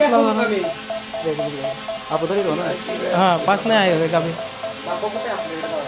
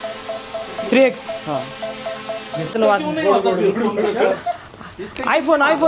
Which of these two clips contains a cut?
second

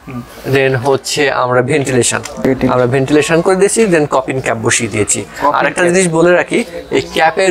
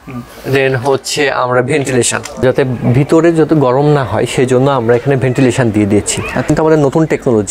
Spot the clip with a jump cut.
second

